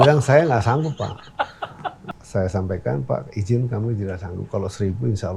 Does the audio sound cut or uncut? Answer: cut